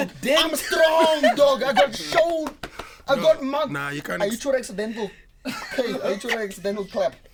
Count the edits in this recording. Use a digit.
0